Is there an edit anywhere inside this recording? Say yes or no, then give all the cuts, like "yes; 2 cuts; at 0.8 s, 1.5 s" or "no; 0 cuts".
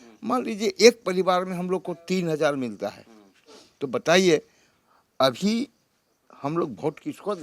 no; 0 cuts